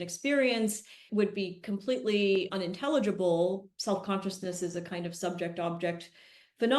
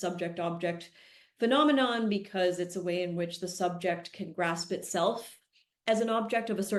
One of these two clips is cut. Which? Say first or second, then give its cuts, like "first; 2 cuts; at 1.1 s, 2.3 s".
first; 2 cuts; at 1.1 s, 3.7 s